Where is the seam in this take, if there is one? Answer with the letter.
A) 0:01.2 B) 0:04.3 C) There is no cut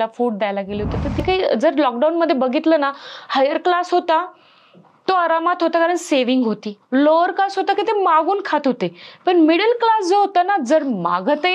A